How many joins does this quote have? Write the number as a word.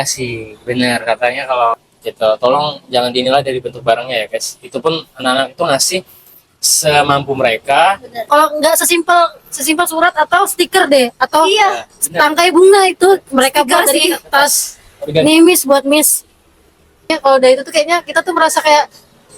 three